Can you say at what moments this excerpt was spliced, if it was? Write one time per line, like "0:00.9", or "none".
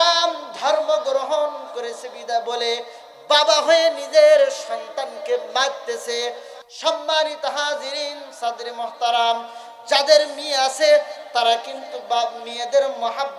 none